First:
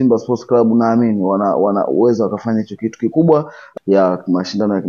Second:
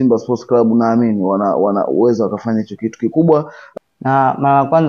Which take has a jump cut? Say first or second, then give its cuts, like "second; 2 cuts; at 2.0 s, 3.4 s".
first; 1 cut; at 3.7 s